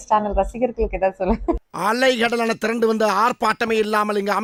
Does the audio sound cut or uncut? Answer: uncut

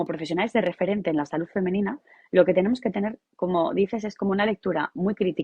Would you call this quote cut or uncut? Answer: uncut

